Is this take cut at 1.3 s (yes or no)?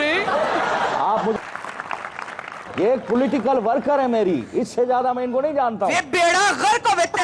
yes